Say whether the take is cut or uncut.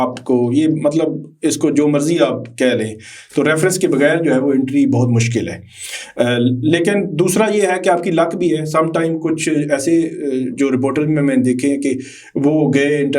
uncut